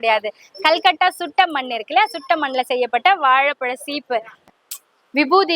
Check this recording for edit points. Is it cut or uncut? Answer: cut